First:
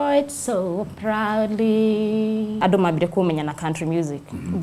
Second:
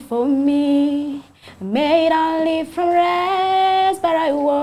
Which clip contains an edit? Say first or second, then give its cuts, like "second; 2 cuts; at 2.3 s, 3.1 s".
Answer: first; 1 cut; at 2.6 s